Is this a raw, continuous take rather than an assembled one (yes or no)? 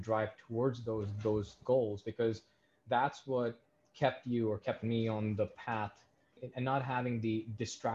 no